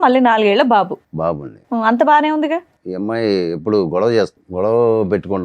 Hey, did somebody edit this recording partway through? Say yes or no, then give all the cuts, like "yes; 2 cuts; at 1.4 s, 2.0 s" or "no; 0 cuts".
yes; 2 cuts; at 2.8 s, 4.4 s